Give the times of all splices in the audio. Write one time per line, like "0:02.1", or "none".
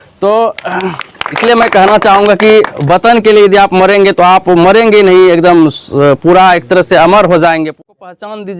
0:01.3
0:07.8